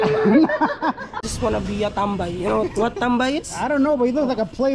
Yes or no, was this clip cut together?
yes